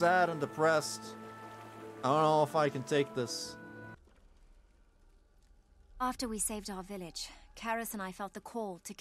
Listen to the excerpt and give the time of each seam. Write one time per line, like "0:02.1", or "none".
0:03.9

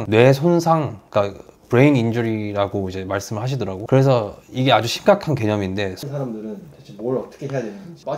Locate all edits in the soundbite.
0:06.0

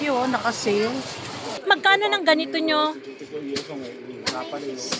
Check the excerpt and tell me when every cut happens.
0:01.6

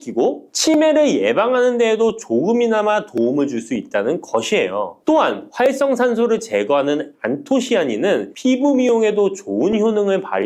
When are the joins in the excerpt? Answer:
none

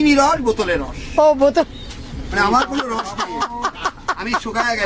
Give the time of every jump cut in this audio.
none

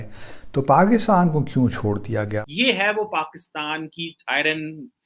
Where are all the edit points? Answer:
0:02.4

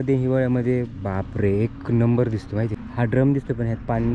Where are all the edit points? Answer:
0:02.8

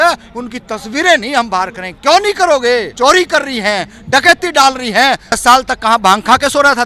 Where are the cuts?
0:02.9
0:05.4

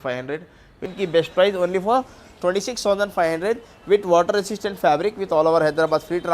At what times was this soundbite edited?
0:00.9

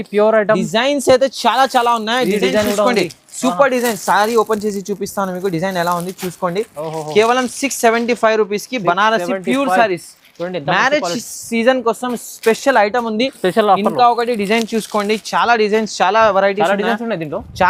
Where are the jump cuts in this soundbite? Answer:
none

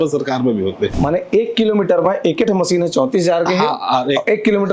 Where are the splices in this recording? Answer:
0:00.9

